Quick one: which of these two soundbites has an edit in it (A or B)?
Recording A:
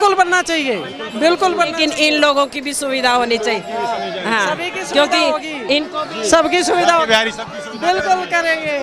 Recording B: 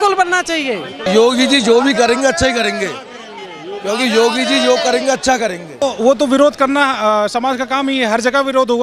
B